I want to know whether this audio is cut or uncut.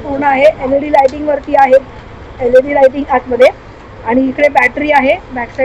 uncut